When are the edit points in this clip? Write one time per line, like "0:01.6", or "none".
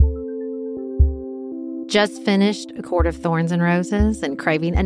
none